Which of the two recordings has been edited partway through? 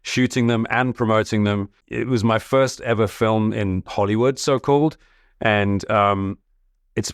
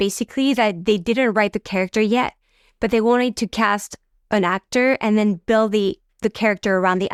first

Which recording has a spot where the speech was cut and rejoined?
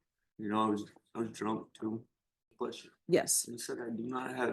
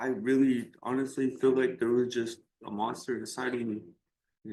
first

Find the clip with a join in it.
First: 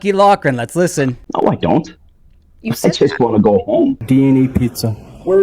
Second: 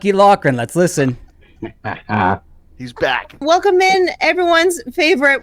first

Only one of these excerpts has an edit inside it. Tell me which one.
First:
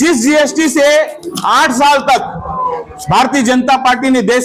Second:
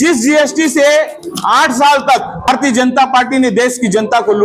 second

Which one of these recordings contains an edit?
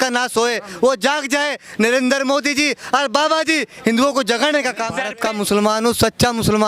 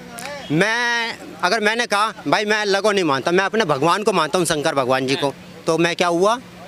first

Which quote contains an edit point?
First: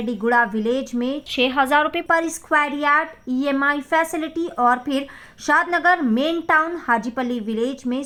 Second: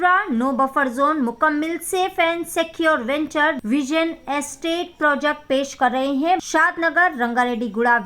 second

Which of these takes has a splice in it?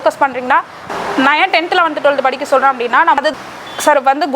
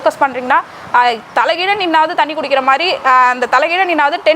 first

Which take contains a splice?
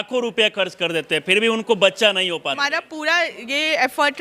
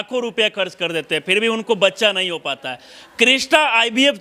first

